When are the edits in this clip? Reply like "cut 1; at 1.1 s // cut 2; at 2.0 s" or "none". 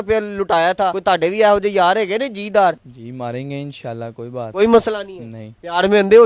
cut 1; at 1.0 s // cut 2; at 2.9 s // cut 3; at 4.4 s